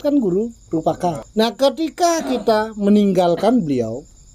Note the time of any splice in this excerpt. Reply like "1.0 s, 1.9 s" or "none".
1.2 s